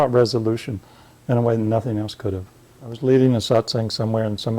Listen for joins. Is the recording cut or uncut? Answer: cut